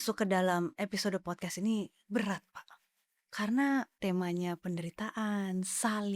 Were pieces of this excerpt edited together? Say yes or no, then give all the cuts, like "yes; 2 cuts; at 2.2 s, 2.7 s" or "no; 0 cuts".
yes; 1 cut; at 3.9 s